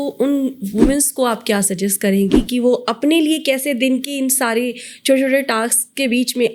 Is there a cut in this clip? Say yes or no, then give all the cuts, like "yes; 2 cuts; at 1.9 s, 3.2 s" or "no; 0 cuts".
no; 0 cuts